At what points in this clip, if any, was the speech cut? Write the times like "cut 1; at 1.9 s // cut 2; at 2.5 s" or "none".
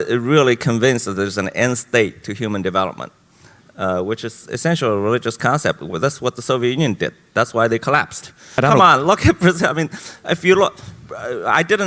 cut 1; at 8.5 s